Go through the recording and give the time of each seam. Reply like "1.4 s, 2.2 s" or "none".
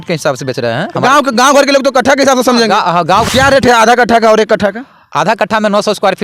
3.3 s

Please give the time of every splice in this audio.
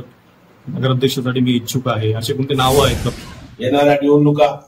3.1 s

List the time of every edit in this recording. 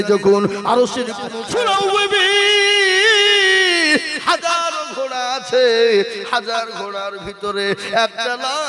1.3 s

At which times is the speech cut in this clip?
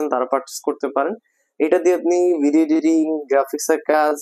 none

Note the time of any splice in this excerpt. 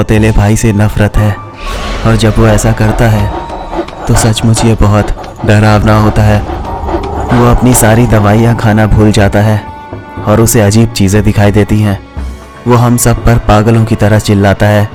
none

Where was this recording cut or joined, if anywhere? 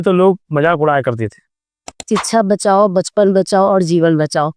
2.1 s

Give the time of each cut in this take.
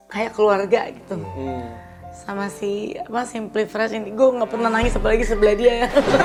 none

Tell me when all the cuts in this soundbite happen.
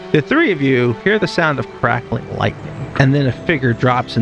1.0 s

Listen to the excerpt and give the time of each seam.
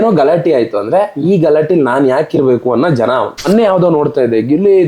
3.4 s

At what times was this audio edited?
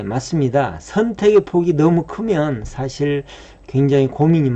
none

